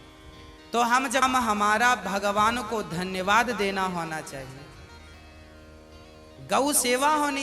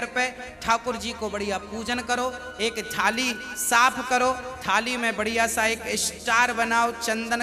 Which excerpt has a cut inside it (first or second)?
first